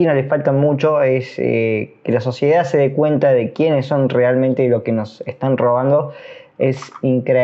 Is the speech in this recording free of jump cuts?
yes; 0 cuts

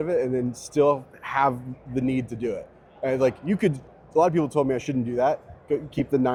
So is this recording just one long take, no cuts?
yes; 0 cuts

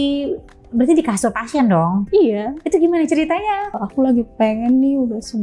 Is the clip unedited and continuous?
no; 1 cut; at 3.7 s

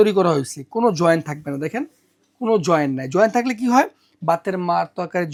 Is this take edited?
no; 0 cuts

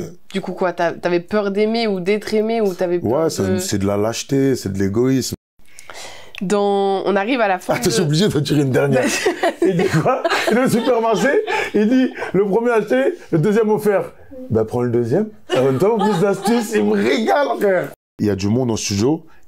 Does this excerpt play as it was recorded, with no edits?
no; 2 cuts; at 5.4 s, 18.1 s

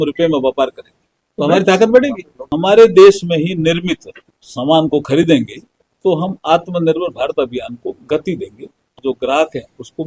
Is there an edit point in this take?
yes; 2 cuts; at 2.4 s, 8.8 s

